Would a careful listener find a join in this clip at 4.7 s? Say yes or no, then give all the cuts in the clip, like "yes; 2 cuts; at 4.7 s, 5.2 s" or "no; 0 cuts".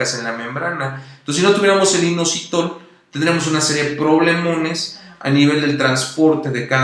no; 1 cut; at 2.0 s